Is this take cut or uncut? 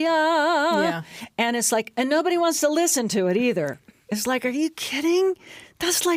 uncut